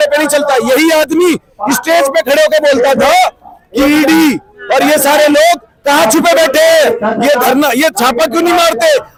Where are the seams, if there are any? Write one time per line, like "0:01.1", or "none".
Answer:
none